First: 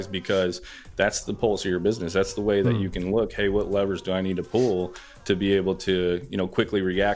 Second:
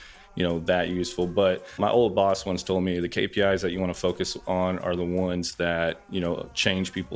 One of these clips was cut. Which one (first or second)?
second